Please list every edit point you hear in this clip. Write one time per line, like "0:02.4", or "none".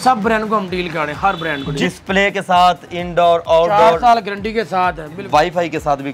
0:01.7
0:05.2